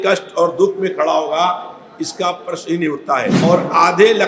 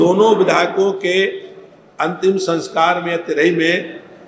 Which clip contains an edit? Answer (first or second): first